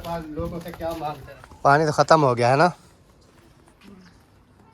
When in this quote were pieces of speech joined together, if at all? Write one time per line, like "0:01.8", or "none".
0:01.3